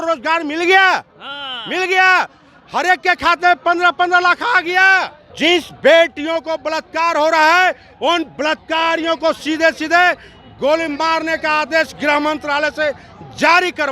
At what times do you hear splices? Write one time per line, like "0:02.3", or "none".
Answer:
0:05.2